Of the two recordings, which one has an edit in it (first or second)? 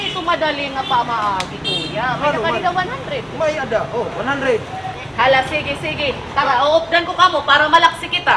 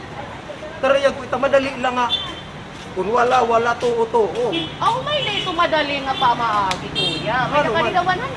first